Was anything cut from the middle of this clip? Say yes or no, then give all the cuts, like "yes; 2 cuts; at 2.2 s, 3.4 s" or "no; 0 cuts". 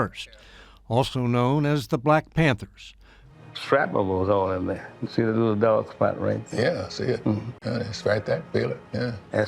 yes; 1 cut; at 7.5 s